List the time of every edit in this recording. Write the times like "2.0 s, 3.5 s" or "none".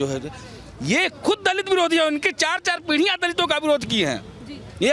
none